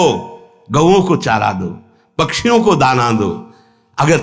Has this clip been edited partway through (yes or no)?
no